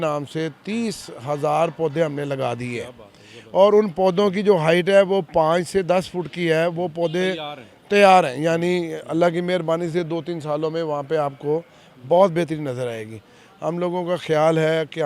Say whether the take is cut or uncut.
uncut